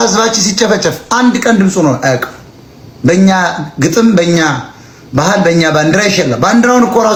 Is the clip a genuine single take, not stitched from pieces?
yes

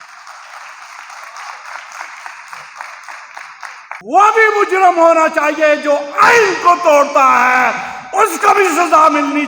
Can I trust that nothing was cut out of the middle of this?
no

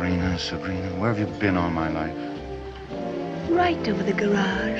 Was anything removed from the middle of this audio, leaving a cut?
no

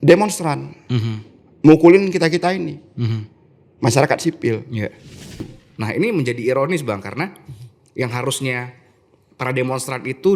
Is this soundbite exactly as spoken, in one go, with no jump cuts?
no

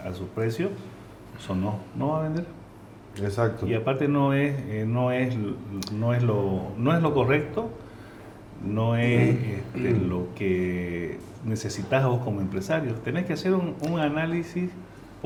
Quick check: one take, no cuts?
yes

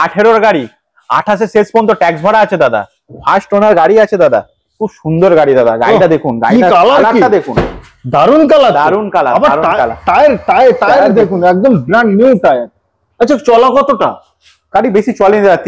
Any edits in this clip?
no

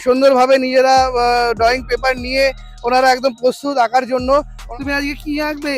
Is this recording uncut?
no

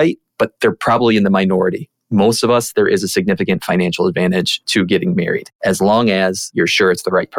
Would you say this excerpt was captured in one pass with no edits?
no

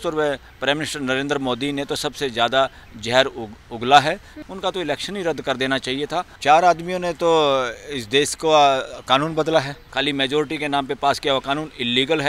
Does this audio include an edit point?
yes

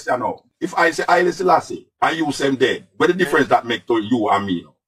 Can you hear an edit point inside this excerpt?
no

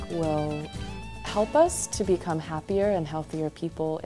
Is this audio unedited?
yes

